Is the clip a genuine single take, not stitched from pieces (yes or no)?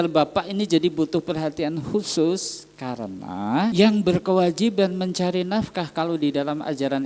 no